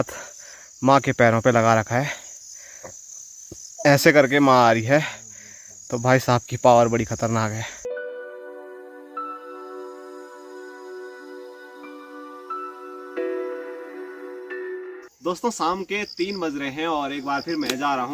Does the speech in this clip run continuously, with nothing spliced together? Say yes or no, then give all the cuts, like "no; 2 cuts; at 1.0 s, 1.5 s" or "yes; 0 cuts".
yes; 0 cuts